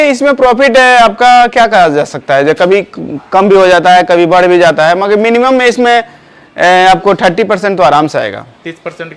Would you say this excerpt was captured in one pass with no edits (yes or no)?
yes